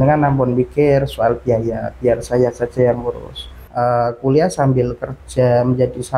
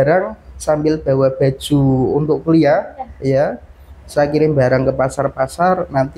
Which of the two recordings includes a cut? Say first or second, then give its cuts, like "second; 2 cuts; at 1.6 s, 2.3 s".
first; 1 cut; at 3.6 s